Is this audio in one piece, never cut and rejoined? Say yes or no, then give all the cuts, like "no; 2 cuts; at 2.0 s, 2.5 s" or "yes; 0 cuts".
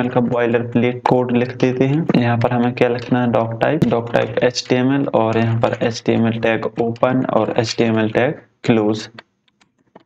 no; 3 cuts; at 1.0 s, 2.0 s, 3.8 s